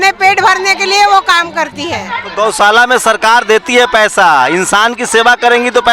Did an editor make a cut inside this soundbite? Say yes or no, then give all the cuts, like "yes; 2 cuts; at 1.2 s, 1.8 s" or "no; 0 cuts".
yes; 1 cut; at 2.2 s